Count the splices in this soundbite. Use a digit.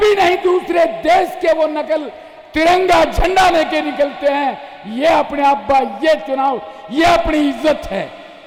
0